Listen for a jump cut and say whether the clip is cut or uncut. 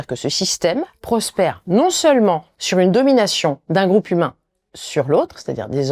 cut